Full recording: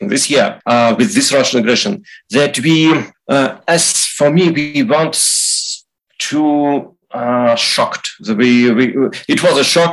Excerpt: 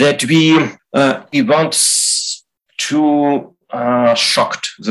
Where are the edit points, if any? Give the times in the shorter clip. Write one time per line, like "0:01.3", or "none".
0:01.3